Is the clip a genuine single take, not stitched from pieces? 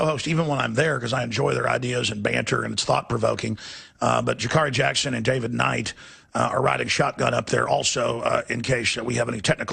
no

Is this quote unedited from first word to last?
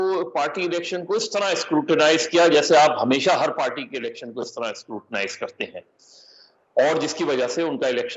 yes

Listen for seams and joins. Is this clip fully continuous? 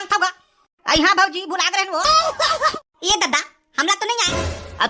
no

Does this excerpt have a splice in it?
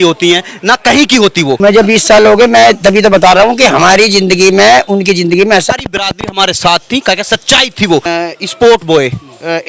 yes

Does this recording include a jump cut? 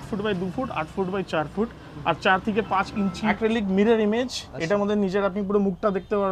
yes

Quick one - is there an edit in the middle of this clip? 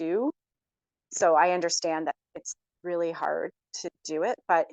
no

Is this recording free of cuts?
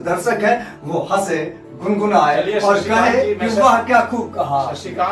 no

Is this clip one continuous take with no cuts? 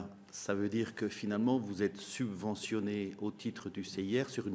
yes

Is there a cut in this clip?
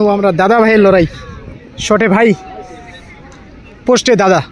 no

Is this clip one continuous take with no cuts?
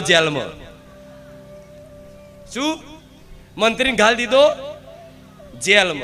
yes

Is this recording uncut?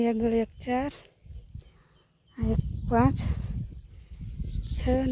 yes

